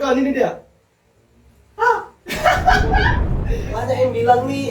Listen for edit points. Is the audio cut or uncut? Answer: cut